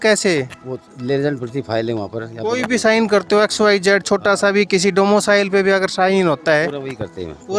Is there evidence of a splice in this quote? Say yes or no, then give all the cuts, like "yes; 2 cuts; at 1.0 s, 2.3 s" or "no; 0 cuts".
no; 0 cuts